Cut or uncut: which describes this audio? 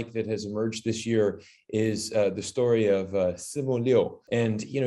uncut